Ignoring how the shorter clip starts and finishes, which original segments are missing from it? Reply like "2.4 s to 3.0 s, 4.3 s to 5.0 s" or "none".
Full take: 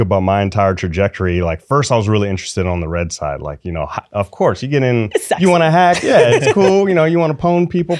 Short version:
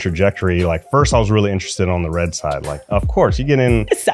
3.6 s to 4.1 s